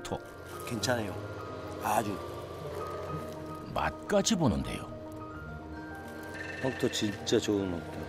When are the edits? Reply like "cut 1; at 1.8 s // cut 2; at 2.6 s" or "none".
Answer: none